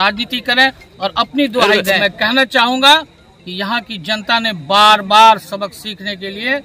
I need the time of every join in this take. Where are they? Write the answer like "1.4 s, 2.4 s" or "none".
2.0 s

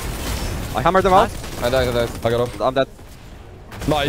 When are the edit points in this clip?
2.9 s

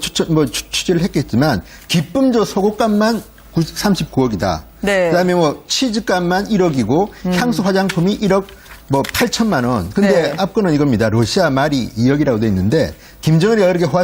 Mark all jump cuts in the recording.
12.5 s

